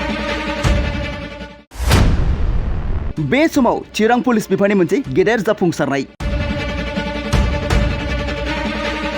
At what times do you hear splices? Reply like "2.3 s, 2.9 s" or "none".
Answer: 1.1 s